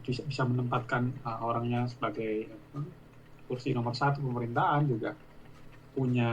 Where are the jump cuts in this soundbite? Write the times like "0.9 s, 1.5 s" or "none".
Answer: 3.3 s